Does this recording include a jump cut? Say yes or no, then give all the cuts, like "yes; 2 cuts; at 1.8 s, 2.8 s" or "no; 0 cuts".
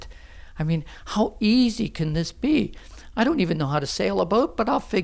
no; 0 cuts